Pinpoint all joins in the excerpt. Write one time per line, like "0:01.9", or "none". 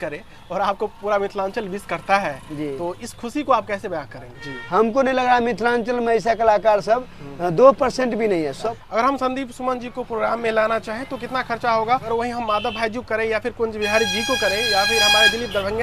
0:04.2
0:08.6
0:12.1